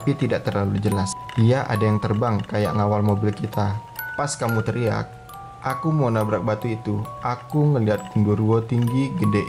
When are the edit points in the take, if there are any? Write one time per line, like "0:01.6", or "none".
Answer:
0:01.2
0:03.8